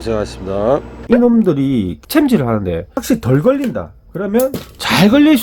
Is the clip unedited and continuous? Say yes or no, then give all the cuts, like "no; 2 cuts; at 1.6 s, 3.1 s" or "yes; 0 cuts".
no; 3 cuts; at 1.0 s, 1.9 s, 2.9 s